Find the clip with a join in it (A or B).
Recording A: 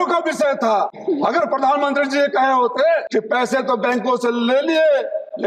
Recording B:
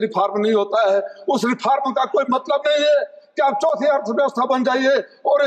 A